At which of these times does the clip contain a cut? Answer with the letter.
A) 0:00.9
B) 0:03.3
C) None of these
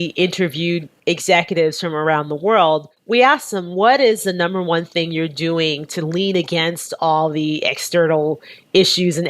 A